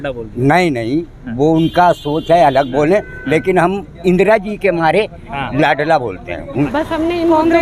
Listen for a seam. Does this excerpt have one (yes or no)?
yes